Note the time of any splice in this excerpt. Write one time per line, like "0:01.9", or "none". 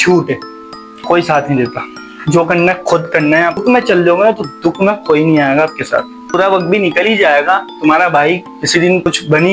0:03.6
0:06.3